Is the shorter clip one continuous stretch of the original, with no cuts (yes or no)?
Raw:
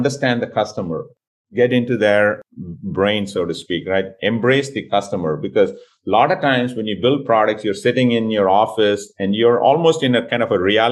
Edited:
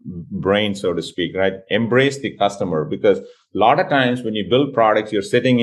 yes